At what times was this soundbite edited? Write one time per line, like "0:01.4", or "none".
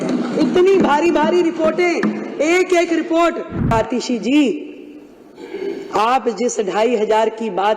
0:03.7